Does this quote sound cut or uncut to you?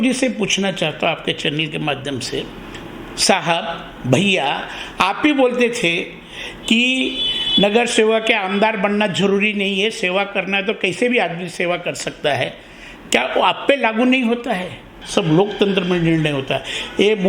cut